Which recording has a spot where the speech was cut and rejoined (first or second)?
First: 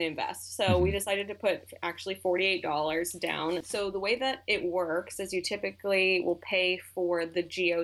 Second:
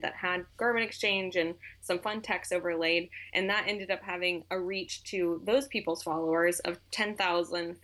first